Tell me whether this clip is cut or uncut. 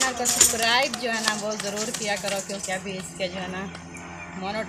uncut